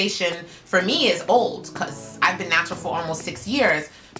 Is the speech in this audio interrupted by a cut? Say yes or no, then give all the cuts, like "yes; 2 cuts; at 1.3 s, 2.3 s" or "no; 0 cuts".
no; 0 cuts